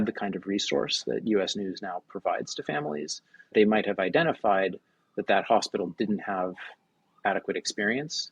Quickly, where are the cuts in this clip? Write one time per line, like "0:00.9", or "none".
0:03.5